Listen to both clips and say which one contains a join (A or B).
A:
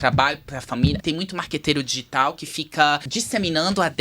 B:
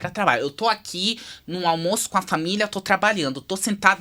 A